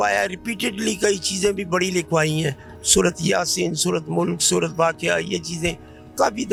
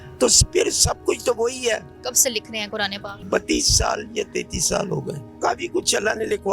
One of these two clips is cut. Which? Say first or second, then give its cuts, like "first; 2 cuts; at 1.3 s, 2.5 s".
second; 3 cuts; at 2.0 s, 3.2 s, 5.3 s